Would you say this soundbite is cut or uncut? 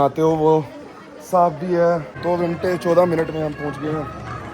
cut